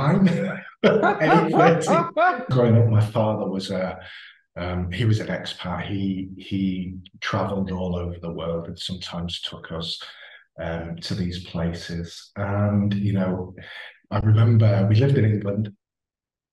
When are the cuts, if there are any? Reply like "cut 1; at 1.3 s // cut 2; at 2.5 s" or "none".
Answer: cut 1; at 2.5 s